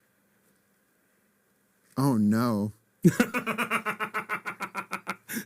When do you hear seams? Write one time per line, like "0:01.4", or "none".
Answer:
none